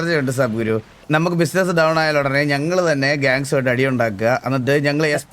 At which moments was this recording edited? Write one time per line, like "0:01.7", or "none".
0:01.0